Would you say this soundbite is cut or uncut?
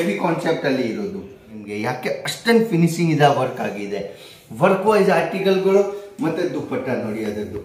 cut